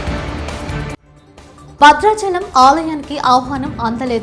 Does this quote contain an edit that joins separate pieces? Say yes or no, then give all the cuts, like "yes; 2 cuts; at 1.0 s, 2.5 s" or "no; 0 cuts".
yes; 1 cut; at 1.2 s